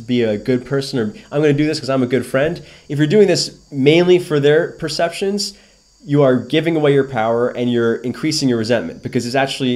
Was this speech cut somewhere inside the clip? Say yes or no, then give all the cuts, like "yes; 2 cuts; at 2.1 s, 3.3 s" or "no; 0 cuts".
no; 0 cuts